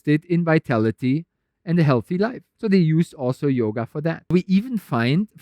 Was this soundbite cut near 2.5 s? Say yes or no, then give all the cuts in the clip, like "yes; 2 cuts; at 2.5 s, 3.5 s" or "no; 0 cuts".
yes; 2 cuts; at 2.5 s, 4.3 s